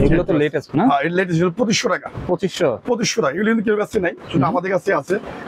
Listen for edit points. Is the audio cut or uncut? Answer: uncut